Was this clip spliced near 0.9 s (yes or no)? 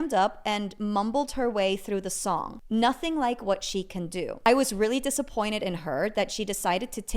no